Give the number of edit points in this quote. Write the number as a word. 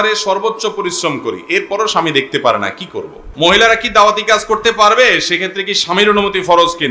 one